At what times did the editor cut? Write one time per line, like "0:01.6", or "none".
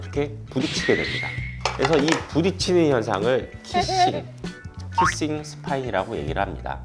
0:04.7